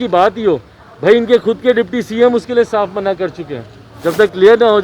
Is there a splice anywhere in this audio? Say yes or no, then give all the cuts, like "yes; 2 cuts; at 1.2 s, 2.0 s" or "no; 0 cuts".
yes; 1 cut; at 3.9 s